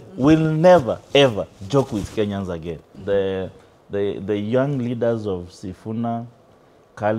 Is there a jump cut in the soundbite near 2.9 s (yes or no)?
yes